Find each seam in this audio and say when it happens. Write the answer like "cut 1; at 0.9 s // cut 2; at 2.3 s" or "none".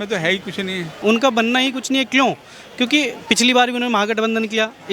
cut 1; at 0.9 s